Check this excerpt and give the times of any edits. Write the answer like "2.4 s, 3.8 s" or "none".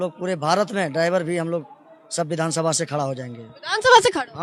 none